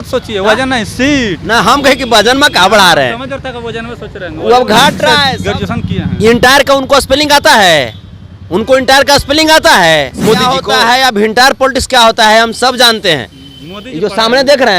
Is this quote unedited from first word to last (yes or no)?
no